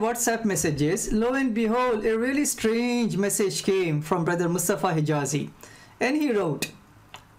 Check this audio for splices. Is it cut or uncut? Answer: cut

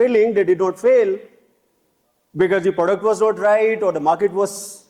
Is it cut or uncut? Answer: uncut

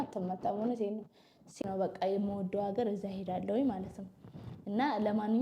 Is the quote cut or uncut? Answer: cut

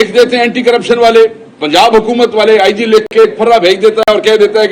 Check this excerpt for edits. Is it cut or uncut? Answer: uncut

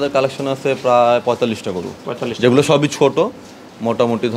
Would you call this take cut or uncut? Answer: uncut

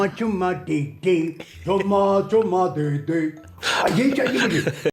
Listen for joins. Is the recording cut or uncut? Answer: uncut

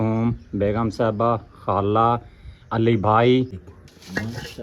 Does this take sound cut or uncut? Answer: cut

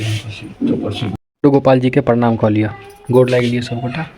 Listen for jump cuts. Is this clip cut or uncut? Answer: cut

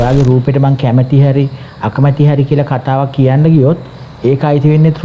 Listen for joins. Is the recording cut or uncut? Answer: uncut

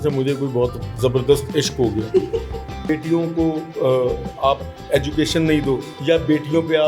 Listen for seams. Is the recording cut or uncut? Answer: cut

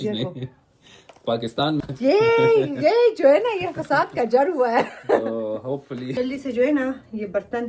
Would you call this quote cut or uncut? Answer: cut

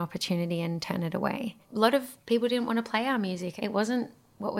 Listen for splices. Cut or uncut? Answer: cut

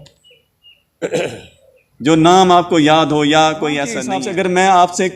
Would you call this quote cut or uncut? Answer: cut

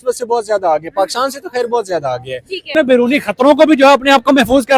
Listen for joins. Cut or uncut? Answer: cut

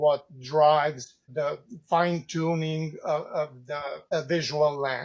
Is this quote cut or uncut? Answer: cut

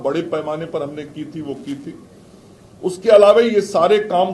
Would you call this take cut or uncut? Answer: uncut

